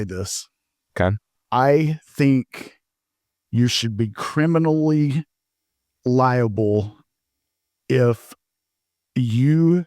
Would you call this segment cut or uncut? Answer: cut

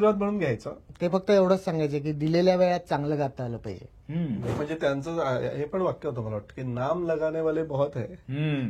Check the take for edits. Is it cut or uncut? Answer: cut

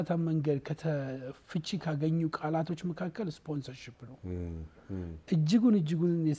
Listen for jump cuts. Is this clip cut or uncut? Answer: uncut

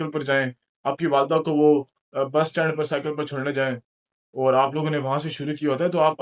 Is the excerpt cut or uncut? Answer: uncut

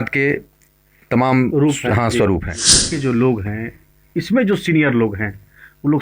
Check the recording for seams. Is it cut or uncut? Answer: cut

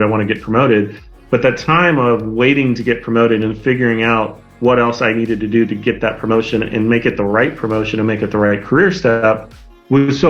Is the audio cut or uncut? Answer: uncut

